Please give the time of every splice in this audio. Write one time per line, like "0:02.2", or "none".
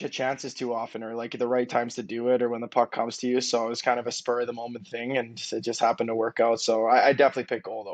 none